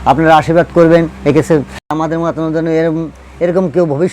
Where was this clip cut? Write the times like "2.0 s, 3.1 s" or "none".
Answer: 1.9 s